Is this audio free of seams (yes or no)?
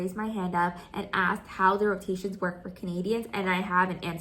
yes